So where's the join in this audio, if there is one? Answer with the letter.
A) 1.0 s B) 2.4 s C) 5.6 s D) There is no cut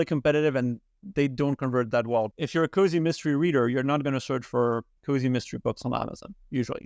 B